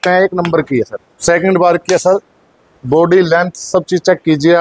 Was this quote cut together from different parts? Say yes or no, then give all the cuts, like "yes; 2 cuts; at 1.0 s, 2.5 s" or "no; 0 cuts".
yes; 1 cut; at 1.1 s